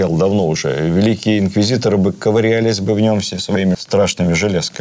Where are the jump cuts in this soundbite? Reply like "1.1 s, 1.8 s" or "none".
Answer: 3.8 s